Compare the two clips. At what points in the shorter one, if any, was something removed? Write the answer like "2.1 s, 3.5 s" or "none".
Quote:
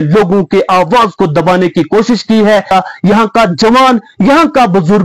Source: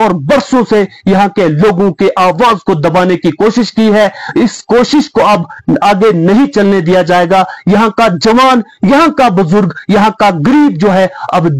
2.7 s